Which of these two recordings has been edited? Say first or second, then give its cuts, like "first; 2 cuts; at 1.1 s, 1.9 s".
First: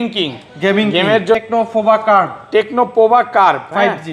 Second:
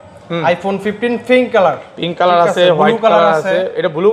first; 1 cut; at 1.4 s